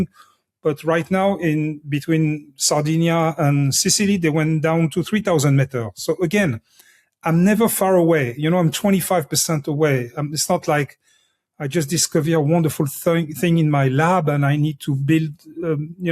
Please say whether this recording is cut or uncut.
uncut